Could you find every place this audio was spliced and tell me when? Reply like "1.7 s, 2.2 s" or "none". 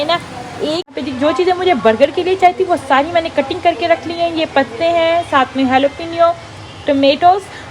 0.9 s